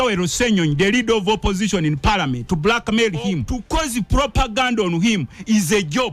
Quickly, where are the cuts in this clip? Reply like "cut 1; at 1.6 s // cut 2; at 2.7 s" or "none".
cut 1; at 3.5 s